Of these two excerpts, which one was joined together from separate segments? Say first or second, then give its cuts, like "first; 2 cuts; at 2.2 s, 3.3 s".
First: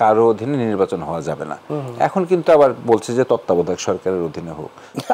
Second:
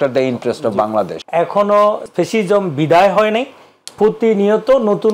second; 2 cuts; at 1.1 s, 2.1 s